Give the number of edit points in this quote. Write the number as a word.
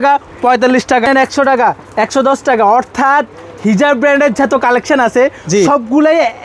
one